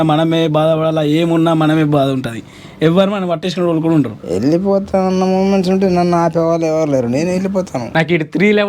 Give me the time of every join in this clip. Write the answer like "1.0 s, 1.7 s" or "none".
4.2 s, 7.8 s